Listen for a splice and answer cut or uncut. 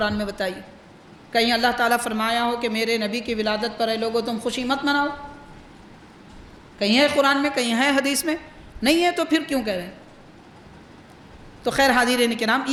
uncut